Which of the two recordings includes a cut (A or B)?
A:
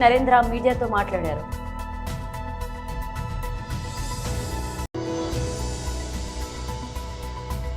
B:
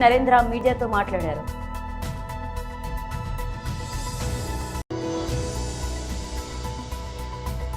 B